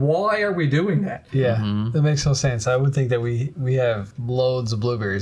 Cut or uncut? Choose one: cut